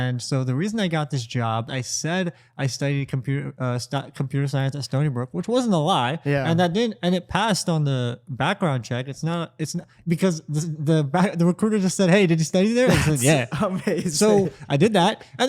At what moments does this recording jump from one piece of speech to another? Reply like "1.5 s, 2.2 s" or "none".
1.7 s